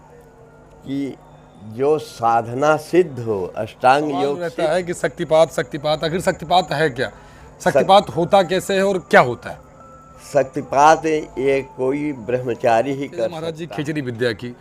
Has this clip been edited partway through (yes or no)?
yes